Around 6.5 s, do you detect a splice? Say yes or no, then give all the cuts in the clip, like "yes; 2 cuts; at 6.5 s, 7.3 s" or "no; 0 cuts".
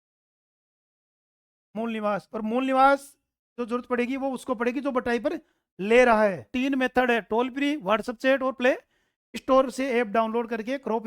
yes; 1 cut; at 6.5 s